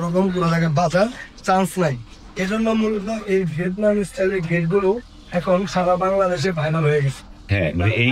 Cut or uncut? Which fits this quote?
uncut